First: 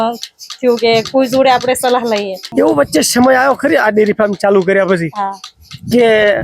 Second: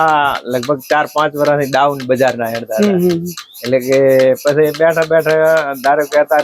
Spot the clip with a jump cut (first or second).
first